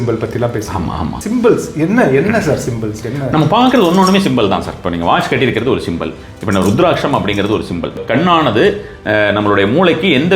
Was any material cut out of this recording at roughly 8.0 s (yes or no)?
yes